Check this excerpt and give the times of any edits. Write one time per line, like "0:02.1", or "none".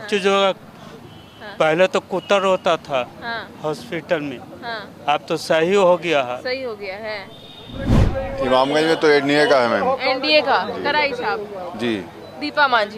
0:07.9